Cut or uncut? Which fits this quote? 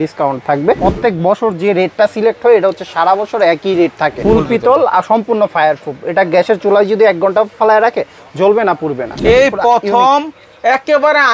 cut